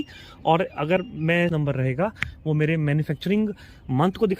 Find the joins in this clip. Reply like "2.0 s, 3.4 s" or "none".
1.5 s